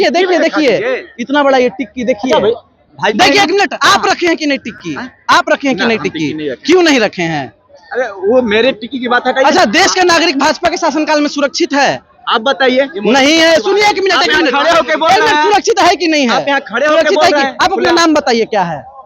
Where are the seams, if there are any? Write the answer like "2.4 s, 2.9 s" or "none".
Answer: none